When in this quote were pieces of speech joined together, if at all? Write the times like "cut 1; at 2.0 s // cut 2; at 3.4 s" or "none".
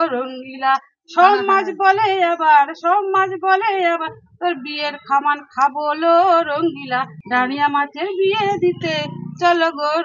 cut 1; at 7.2 s